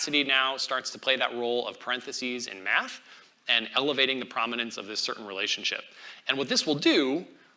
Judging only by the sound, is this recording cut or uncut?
uncut